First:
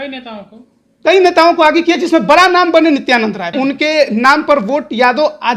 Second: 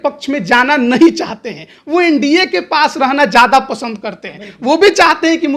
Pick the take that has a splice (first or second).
first